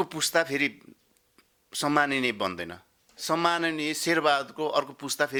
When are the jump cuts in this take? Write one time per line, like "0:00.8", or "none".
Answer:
none